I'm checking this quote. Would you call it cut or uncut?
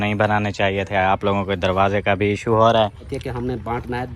cut